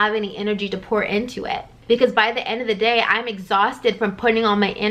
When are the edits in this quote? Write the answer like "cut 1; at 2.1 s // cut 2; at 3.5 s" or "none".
none